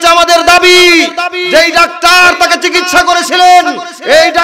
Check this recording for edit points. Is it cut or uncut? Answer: cut